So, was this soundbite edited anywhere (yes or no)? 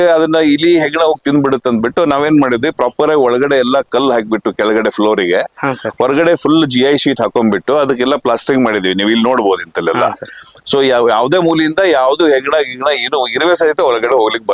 no